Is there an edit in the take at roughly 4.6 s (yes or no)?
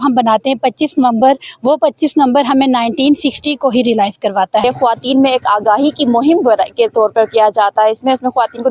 yes